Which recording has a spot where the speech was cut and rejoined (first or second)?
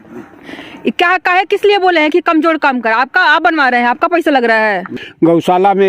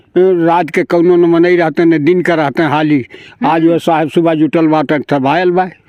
first